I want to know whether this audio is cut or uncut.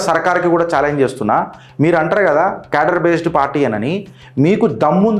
uncut